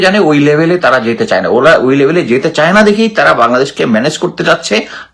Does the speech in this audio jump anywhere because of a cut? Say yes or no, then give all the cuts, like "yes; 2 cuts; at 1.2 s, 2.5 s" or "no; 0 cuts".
no; 0 cuts